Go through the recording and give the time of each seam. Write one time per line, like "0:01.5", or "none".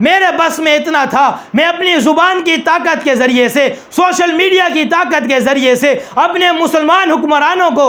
none